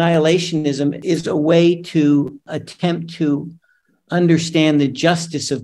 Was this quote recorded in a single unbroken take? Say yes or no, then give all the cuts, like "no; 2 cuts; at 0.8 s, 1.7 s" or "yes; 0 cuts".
no; 2 cuts; at 1.0 s, 2.4 s